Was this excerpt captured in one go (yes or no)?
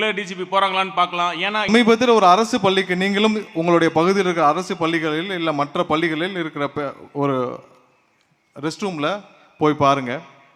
no